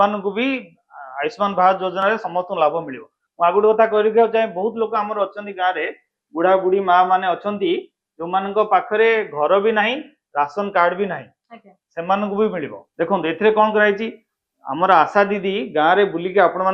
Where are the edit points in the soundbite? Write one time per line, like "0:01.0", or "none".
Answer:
0:12.8